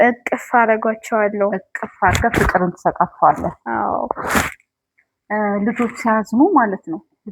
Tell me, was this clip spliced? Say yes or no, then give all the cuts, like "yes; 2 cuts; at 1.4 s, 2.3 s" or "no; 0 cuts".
no; 0 cuts